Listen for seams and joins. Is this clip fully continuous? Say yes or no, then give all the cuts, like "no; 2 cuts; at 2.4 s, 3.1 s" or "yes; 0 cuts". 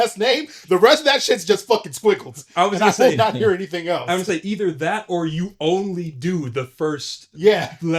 yes; 0 cuts